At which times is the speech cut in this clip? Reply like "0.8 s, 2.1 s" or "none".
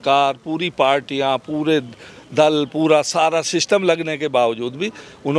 none